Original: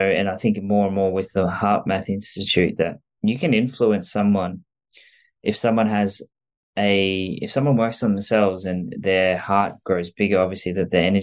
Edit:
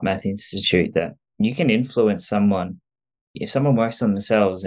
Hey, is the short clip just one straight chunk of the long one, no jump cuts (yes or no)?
no